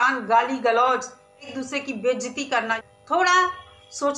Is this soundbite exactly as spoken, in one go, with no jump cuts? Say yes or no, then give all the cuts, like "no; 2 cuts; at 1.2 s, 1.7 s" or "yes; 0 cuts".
no; 2 cuts; at 1.5 s, 2.8 s